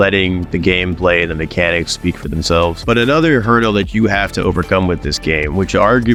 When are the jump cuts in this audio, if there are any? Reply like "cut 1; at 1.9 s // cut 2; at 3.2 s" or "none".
none